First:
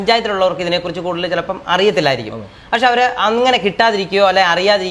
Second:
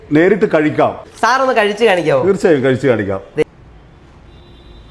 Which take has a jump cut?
second; 2 cuts; at 1.1 s, 3.4 s

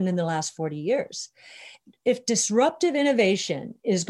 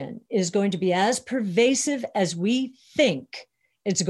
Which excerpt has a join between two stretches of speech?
first; 1 cut; at 1.8 s

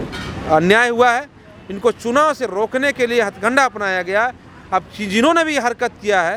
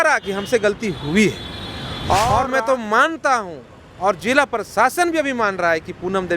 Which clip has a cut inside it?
second; 1 cut; at 2.3 s

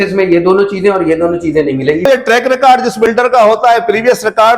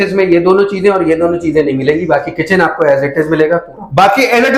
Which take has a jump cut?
first; 1 cut; at 2.1 s

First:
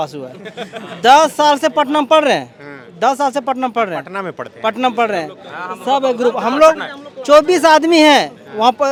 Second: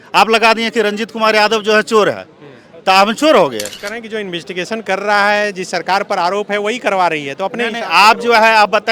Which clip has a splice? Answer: second; 1 cut; at 3.8 s

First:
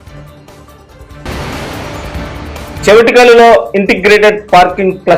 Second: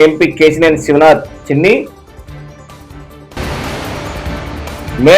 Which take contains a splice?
first; 2 cuts; at 1.2 s, 2.8 s

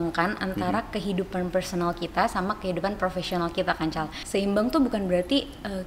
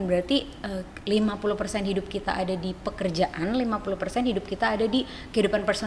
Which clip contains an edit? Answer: first; 1 cut; at 4.1 s

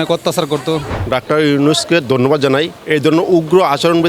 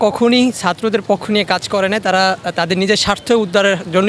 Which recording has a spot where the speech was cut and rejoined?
first; 2 cuts; at 0.9 s, 2.8 s

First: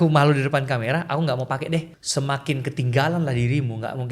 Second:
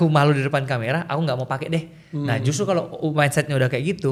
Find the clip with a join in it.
first; 1 cut; at 2.0 s

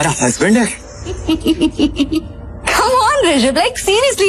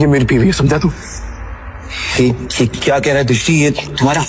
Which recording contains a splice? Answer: first; 1 cut; at 1.2 s

